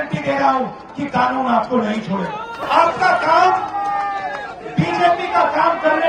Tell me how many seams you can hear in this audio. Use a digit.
1